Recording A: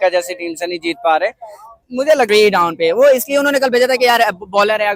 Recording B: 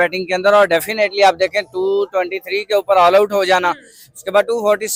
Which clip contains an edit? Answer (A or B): A